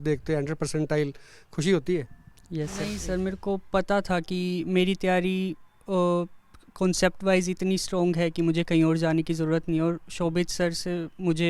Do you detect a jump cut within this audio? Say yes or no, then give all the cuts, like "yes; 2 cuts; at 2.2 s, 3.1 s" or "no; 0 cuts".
yes; 1 cut; at 3.0 s